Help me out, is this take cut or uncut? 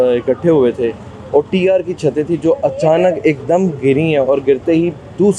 uncut